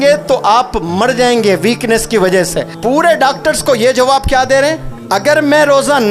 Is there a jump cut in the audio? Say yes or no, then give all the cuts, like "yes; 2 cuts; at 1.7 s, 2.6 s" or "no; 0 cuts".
yes; 2 cuts; at 2.7 s, 4.9 s